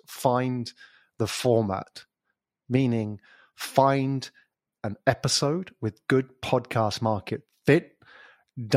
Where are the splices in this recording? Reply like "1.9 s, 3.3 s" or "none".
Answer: none